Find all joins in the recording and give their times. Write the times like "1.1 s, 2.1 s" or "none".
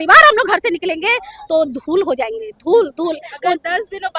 none